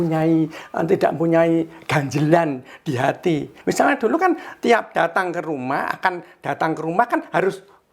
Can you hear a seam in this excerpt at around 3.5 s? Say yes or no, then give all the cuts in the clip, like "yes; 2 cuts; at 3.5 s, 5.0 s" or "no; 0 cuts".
yes; 1 cut; at 3.5 s